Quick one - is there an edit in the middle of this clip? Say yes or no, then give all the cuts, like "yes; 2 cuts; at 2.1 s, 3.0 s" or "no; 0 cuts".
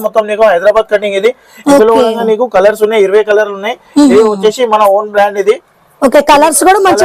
no; 0 cuts